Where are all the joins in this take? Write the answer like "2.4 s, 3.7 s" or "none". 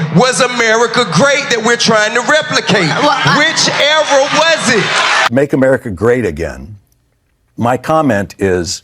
5.3 s